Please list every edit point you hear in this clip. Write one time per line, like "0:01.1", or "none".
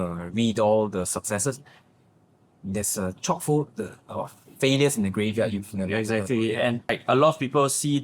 0:06.9